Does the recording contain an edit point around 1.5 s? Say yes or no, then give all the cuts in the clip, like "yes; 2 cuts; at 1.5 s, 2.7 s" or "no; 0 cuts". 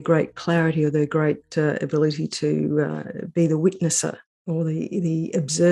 no; 1 cut; at 4.3 s